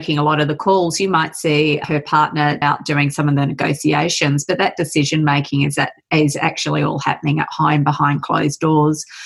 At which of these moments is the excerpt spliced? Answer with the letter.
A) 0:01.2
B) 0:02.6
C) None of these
B